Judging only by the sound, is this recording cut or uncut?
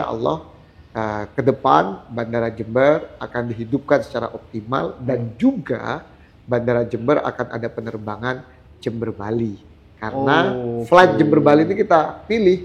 uncut